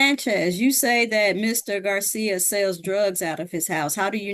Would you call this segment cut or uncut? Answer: uncut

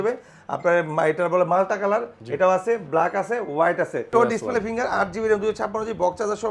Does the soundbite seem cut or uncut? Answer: cut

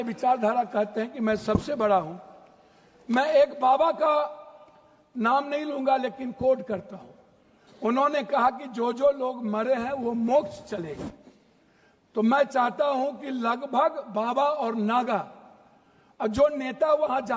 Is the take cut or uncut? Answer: uncut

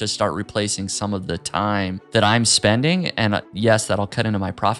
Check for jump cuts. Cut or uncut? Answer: cut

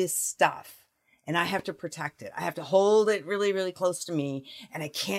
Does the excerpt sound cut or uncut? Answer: uncut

